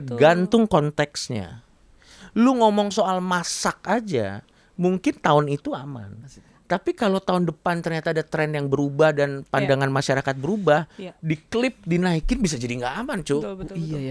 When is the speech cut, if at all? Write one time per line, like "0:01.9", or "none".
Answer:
none